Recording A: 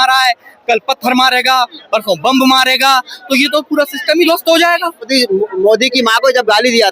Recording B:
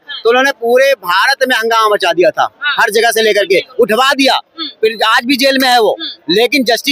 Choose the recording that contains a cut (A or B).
A